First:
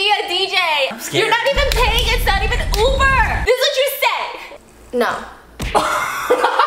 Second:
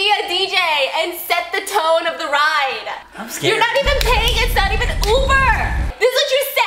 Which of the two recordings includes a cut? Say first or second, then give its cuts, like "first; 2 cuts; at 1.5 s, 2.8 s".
first; 2 cuts; at 0.9 s, 3.4 s